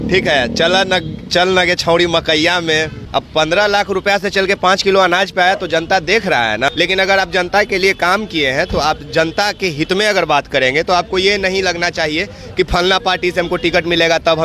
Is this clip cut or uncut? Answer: cut